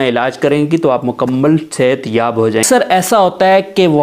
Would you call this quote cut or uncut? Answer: cut